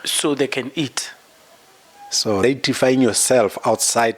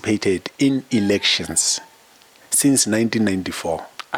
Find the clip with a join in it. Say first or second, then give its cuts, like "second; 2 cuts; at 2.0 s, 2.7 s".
first; 1 cut; at 2.4 s